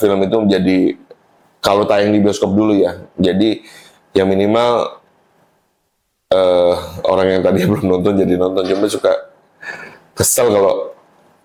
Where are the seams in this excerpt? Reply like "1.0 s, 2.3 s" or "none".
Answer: none